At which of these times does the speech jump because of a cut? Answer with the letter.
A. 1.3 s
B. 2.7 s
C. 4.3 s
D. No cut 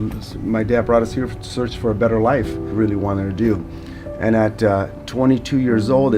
B